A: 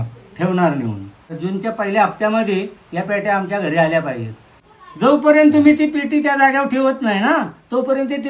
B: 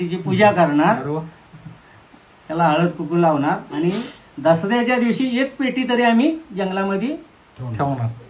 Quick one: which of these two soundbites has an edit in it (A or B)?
A